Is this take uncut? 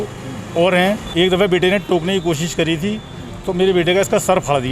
no; 1 cut; at 1.0 s

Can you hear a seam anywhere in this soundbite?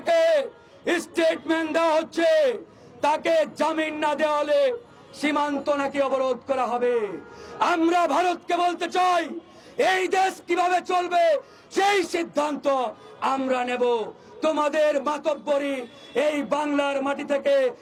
no; 0 cuts

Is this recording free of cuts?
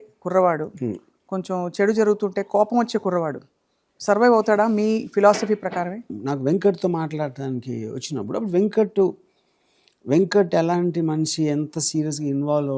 no; 1 cut; at 6.1 s

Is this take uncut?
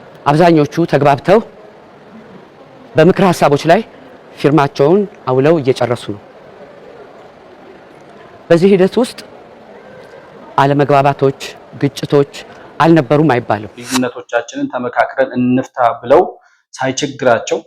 no; 1 cut; at 13.8 s

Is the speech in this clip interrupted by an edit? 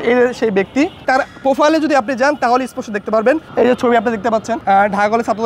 yes; 3 cuts; at 1.0 s, 3.5 s, 4.6 s

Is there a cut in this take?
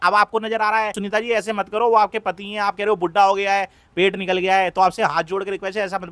yes; 1 cut; at 1.0 s

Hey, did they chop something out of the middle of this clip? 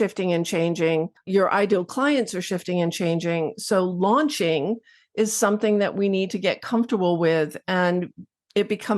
yes; 1 cut; at 1.2 s

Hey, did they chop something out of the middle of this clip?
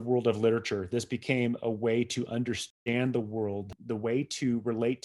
yes; 2 cuts; at 2.6 s, 3.7 s

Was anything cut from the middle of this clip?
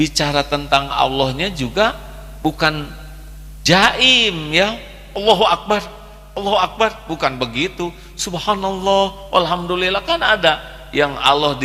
no; 0 cuts

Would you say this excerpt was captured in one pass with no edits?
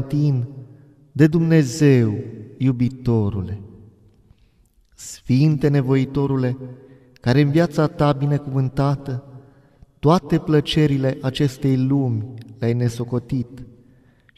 no; 1 cut; at 4.5 s

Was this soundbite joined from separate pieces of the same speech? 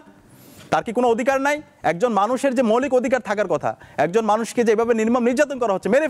no; 0 cuts

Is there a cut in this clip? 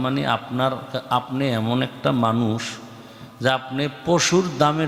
no; 0 cuts

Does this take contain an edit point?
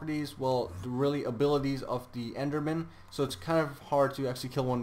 no; 0 cuts

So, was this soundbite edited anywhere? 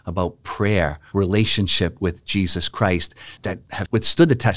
yes; 2 cuts; at 1.0 s, 3.4 s

